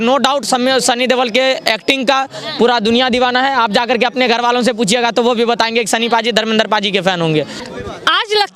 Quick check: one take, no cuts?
no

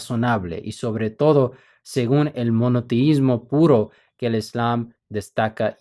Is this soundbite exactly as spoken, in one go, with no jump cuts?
yes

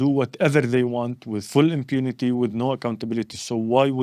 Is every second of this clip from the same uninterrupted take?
yes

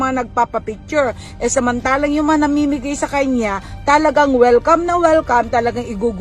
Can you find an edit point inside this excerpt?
no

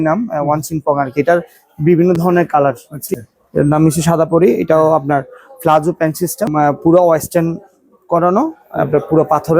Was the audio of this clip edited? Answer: yes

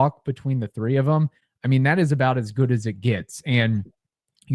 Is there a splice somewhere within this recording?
no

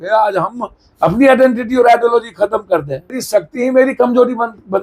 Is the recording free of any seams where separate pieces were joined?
no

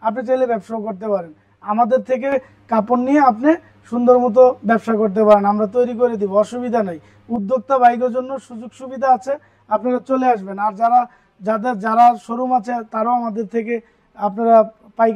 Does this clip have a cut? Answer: no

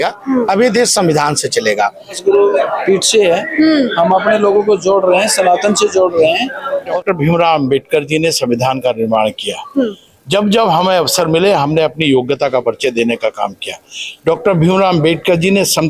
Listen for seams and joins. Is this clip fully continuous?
no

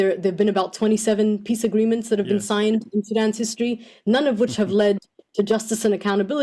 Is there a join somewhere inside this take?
no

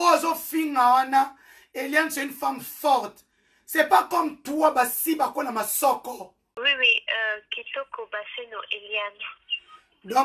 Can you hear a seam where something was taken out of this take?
yes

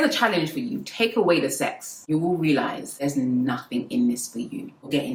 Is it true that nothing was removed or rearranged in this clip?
yes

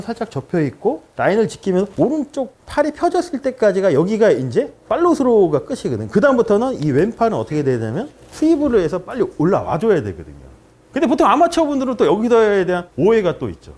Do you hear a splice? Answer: no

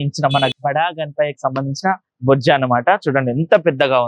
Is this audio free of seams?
yes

